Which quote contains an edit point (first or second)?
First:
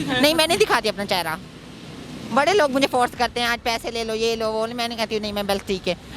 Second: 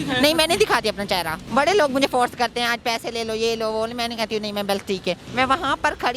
second